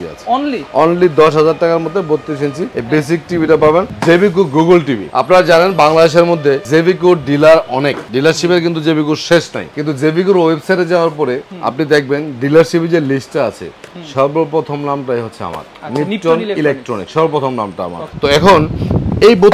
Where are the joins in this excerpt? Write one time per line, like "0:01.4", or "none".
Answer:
none

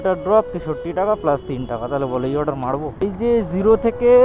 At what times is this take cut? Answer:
0:03.1

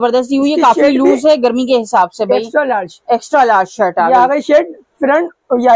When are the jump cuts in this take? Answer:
none

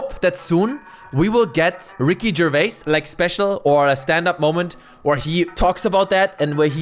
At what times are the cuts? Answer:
0:01.9

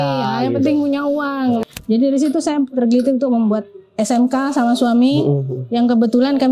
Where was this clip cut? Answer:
0:01.6

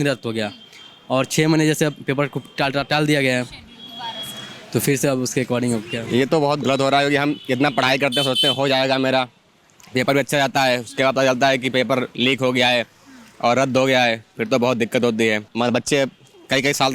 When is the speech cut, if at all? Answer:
0:05.9
0:15.5

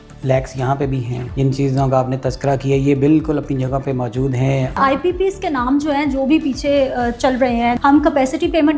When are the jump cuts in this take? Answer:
0:01.2
0:04.8
0:07.8

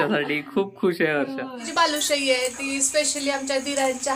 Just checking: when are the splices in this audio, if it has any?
0:01.6

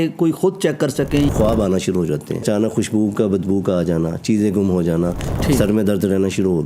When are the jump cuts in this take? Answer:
0:01.3
0:02.4
0:05.2

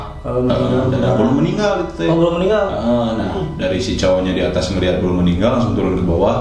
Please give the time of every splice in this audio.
none

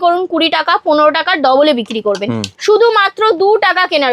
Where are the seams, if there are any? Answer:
0:02.5

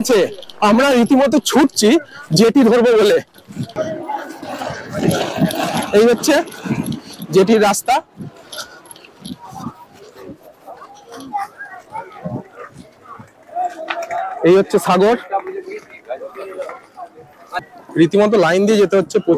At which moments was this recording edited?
none

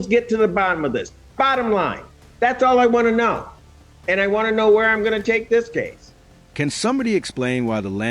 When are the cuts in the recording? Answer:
none

